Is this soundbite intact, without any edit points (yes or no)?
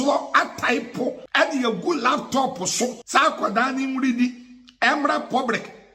no